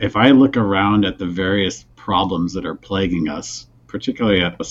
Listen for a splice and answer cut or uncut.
uncut